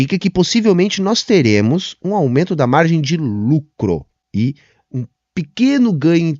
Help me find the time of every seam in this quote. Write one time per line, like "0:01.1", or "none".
0:04.2